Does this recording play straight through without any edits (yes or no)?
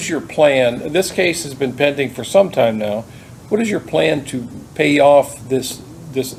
yes